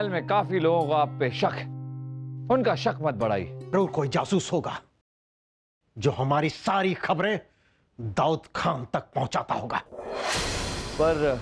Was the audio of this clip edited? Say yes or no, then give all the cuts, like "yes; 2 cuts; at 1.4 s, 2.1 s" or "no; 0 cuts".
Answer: yes; 1 cut; at 3.7 s